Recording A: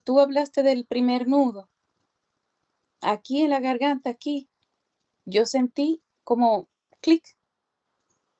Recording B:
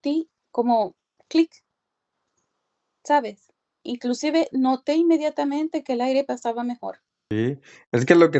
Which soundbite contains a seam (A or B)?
B